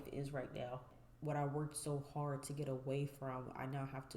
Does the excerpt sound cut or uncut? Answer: cut